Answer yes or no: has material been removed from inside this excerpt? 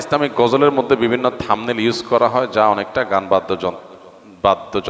no